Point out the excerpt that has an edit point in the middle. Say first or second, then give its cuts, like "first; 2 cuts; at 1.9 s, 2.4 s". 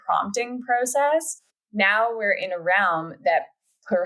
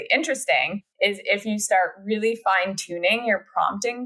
first; 1 cut; at 1.5 s